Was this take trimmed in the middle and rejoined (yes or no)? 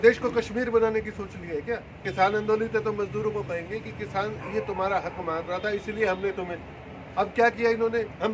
yes